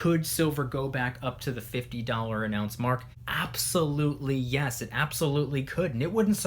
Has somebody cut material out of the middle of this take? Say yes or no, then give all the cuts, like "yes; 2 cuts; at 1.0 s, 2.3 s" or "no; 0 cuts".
yes; 1 cut; at 3.2 s